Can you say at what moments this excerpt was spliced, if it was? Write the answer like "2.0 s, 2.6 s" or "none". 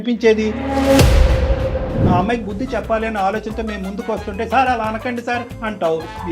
2.0 s